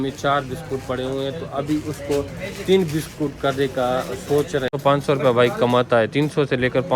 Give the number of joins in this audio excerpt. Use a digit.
1